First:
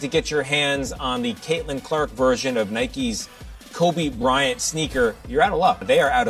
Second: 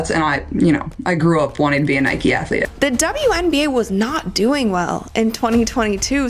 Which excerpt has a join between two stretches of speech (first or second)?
second